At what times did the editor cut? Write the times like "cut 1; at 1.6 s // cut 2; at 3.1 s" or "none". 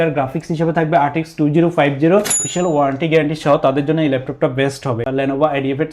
cut 1; at 2.4 s // cut 2; at 5.1 s

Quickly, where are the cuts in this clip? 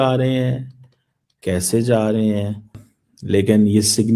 cut 1; at 2.8 s

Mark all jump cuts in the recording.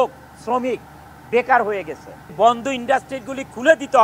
cut 1; at 2.3 s

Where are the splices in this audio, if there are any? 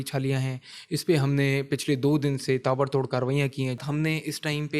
cut 1; at 3.8 s

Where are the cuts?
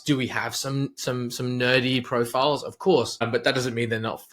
cut 1; at 3.2 s

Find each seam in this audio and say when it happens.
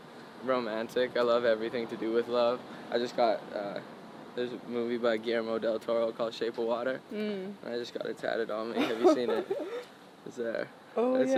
none

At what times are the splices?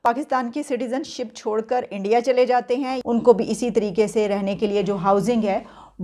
cut 1; at 3.0 s

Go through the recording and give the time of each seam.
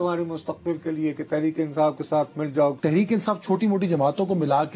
cut 1; at 2.8 s

